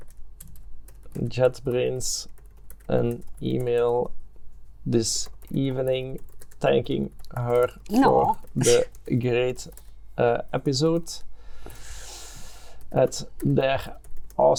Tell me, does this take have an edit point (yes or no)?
no